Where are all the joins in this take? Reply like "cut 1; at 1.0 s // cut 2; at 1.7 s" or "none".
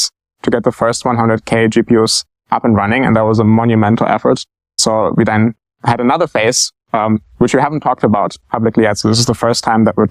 cut 1; at 4.8 s // cut 2; at 5.7 s